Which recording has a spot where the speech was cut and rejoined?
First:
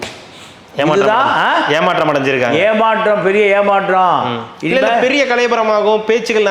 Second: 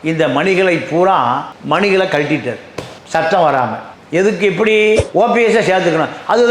second; 1 cut; at 5.1 s

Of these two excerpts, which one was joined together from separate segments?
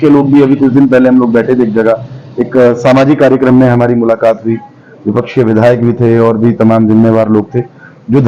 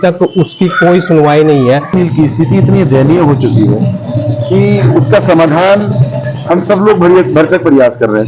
second; 1 cut; at 1.9 s

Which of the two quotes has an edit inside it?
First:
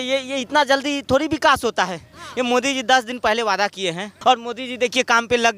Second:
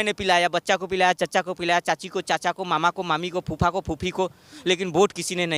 first; 1 cut; at 4.1 s

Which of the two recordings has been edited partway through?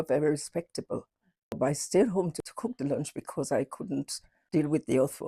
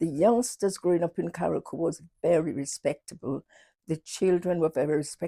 first; 3 cuts; at 1.6 s, 2.4 s, 4.3 s

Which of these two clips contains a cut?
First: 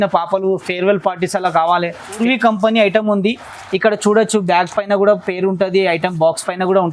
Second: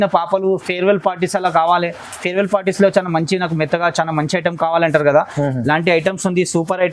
first; 1 cut; at 2.2 s

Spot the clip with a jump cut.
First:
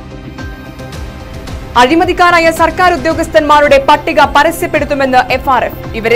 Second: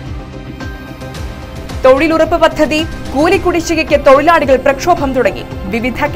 first; 1 cut; at 1.0 s

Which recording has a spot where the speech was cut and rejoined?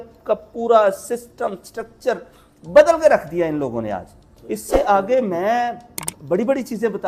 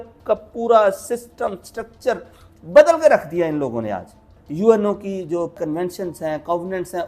second; 1 cut; at 4.4 s

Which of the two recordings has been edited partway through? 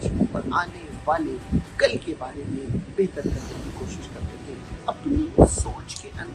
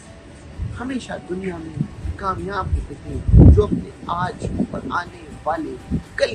first; 1 cut; at 4.8 s

